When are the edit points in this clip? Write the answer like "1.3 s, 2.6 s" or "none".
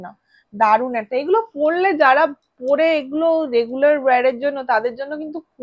none